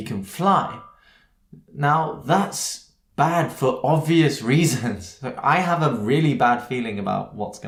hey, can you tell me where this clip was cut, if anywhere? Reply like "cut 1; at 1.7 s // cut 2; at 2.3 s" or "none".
none